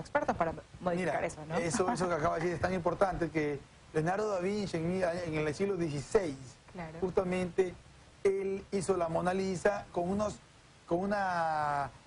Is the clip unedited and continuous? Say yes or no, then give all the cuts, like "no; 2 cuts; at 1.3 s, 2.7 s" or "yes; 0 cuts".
no; 1 cut; at 3.1 s